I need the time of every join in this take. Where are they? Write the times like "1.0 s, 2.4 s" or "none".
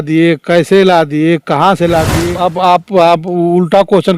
2.2 s